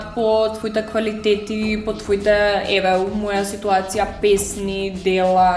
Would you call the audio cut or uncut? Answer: uncut